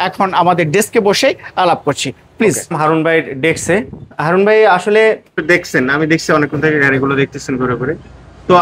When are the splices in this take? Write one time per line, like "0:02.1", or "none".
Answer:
0:05.4